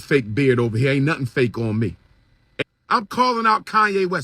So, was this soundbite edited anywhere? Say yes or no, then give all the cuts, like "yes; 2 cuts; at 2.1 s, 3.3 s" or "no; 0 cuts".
yes; 1 cut; at 2.6 s